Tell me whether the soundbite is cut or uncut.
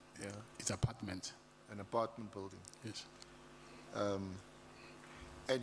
uncut